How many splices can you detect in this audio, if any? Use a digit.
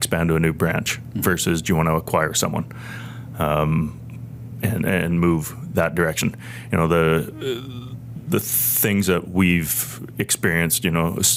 0